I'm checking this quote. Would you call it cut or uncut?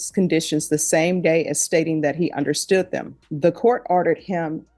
cut